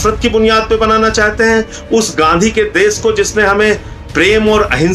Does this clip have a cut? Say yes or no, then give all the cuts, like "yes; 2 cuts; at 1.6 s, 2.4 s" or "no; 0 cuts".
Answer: no; 0 cuts